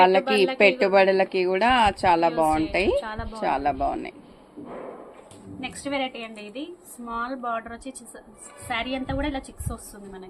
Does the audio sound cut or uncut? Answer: uncut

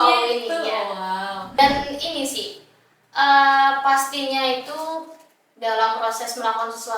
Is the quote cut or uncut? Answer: cut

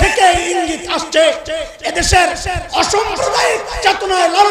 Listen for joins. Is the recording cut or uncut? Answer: uncut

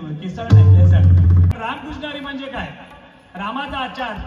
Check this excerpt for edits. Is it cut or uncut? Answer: cut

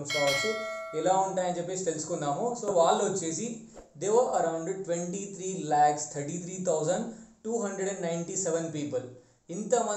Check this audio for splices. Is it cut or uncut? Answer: cut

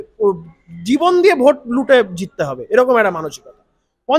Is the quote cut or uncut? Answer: uncut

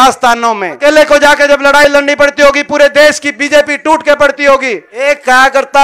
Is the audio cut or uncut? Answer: cut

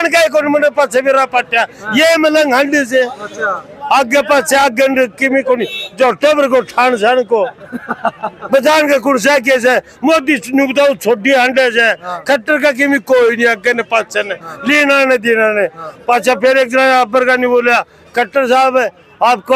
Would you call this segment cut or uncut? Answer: uncut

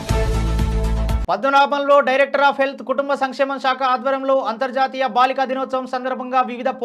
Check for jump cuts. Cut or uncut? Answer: cut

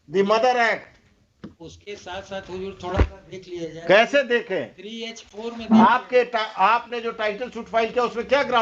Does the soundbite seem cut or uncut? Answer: uncut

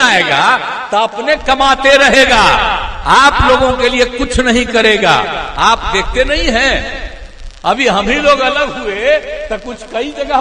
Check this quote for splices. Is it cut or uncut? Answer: uncut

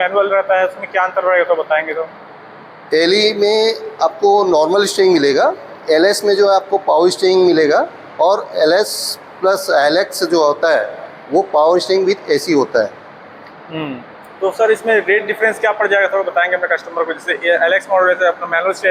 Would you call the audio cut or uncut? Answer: uncut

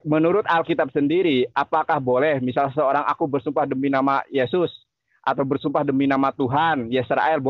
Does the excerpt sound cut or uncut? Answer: uncut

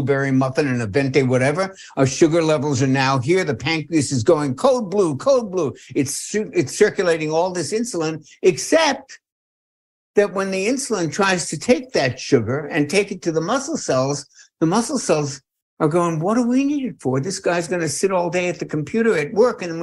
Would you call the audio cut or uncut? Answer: uncut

